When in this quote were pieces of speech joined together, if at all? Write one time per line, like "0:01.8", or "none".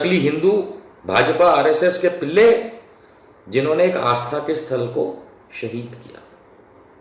none